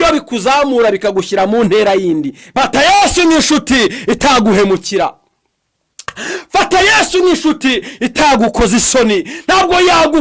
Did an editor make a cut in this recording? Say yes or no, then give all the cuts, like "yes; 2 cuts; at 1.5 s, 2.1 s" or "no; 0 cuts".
yes; 1 cut; at 2.4 s